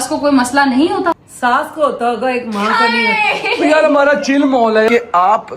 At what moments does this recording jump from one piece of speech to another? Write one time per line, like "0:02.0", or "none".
0:01.3
0:03.9
0:04.9